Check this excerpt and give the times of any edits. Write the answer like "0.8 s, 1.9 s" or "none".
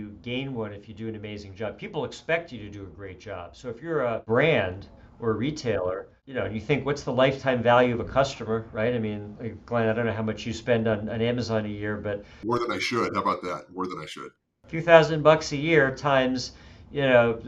4.2 s, 6.2 s, 12.3 s, 14.2 s